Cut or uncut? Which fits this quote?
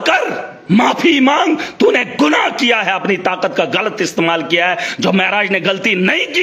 uncut